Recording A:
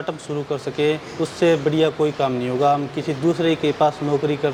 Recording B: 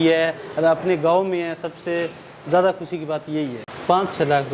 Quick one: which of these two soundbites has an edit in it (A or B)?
B